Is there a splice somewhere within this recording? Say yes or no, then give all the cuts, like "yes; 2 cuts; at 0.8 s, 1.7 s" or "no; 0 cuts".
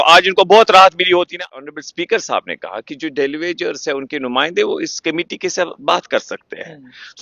yes; 1 cut; at 1.4 s